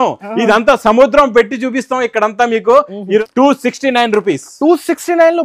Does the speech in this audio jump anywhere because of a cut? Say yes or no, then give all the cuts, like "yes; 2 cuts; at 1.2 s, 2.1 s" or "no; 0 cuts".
yes; 1 cut; at 3.2 s